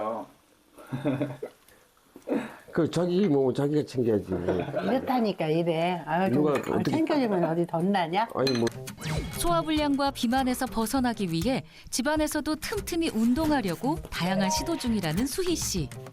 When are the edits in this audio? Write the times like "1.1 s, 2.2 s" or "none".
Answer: 8.7 s